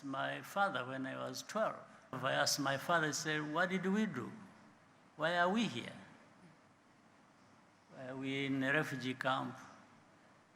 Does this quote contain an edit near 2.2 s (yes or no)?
yes